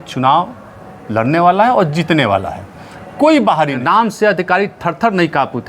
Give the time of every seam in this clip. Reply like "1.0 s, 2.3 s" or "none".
3.8 s